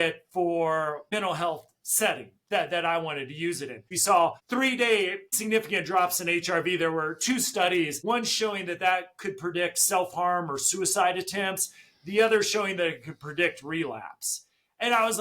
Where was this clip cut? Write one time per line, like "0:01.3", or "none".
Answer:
0:01.1
0:03.8